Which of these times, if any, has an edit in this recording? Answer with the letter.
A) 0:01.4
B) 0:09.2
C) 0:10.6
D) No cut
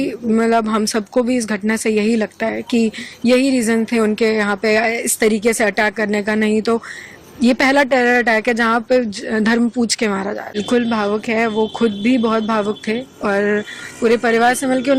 C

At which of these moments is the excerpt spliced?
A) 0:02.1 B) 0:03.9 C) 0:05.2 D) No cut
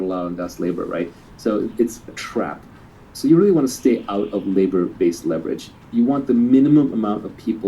A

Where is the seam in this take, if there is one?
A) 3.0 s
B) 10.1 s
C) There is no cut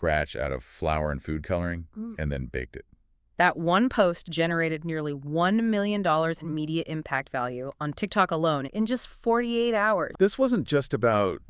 B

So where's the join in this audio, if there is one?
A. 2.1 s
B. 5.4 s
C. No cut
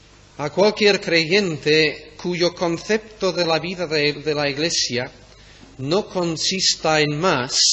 B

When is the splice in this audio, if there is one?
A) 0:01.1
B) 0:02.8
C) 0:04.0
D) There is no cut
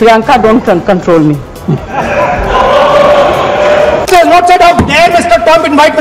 C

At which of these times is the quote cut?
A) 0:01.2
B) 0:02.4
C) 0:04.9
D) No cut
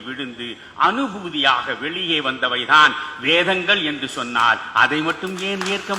D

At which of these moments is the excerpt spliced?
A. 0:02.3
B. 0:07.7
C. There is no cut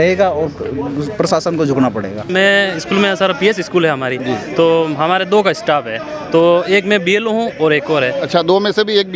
A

